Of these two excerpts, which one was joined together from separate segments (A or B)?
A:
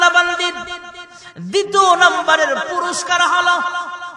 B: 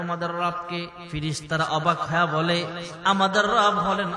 B